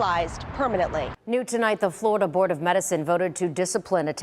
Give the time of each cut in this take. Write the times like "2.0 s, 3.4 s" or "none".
1.1 s